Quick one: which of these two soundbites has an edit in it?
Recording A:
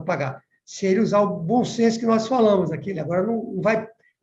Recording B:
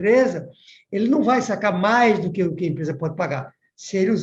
A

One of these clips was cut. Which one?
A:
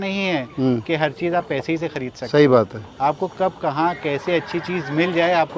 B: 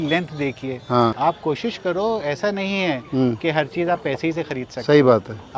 B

